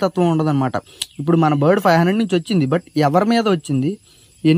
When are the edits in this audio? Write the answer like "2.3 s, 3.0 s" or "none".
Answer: none